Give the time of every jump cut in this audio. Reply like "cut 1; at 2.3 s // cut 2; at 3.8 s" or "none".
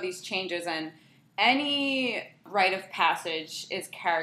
cut 1; at 2.4 s